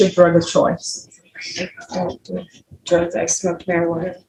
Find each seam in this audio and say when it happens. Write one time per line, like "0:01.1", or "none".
none